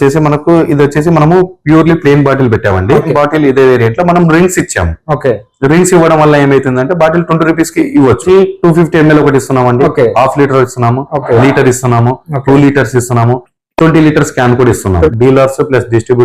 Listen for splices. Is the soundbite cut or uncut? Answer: cut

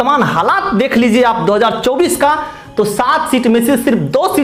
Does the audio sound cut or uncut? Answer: uncut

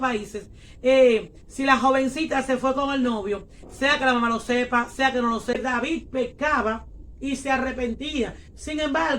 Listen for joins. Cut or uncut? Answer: cut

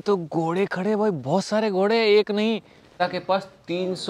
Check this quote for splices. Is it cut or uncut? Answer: cut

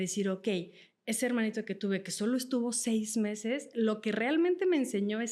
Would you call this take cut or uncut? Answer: uncut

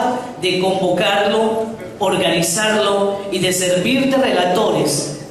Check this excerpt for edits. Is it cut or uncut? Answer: cut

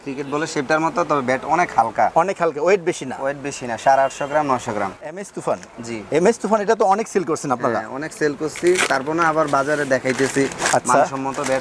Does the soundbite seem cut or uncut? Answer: cut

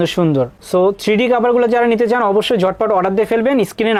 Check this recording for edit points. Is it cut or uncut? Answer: uncut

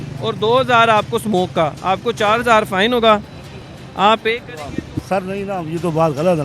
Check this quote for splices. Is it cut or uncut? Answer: cut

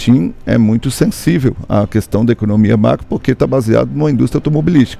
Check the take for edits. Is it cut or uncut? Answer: uncut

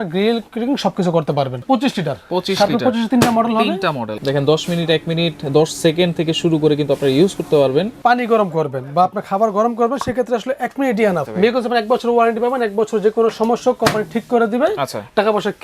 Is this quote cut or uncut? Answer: cut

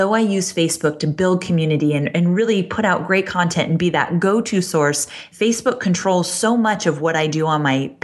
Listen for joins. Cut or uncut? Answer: cut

